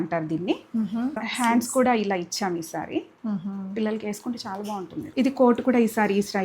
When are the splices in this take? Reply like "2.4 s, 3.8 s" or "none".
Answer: 1.2 s, 5.1 s